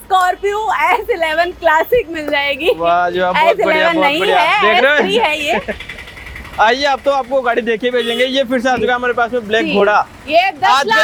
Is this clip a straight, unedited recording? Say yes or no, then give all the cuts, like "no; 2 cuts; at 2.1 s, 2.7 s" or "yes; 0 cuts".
yes; 0 cuts